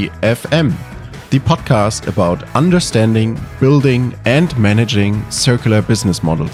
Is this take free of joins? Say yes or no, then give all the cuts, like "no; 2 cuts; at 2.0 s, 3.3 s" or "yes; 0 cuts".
yes; 0 cuts